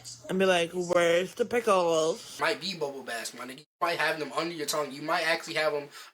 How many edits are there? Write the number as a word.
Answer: one